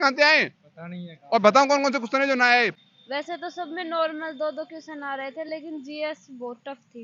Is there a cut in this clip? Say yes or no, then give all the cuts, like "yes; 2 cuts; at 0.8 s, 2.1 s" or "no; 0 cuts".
yes; 1 cut; at 2.8 s